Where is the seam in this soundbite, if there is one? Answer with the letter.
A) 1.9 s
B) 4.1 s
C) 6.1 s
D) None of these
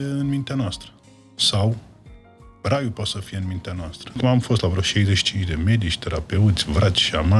B